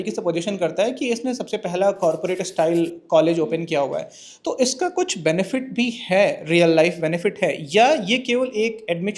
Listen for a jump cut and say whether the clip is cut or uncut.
uncut